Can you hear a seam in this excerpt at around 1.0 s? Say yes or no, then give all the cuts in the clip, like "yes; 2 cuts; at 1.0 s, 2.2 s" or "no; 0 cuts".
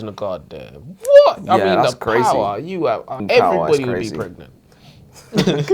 no; 1 cut; at 3.2 s